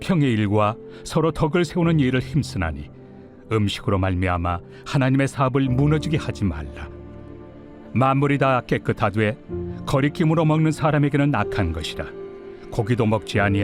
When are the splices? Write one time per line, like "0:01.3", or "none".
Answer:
0:03.1
0:12.2